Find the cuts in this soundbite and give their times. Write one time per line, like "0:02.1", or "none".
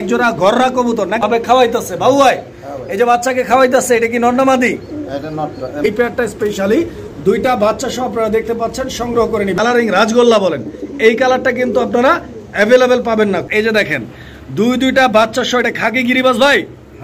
0:01.2
0:05.8
0:09.6
0:13.1